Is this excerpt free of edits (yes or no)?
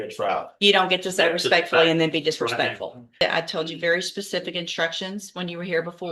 no